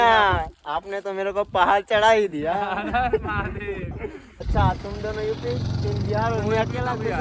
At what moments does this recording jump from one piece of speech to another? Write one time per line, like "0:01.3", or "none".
0:04.5